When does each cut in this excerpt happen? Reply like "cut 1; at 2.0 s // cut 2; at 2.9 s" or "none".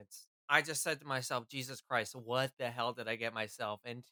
none